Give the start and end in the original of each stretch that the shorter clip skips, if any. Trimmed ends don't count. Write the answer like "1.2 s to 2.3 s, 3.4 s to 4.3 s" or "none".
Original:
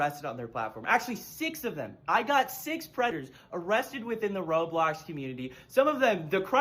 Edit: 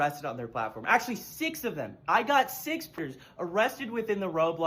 3.0 s to 3.1 s